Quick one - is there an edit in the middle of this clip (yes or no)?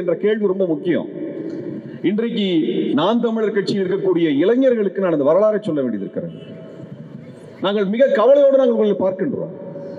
no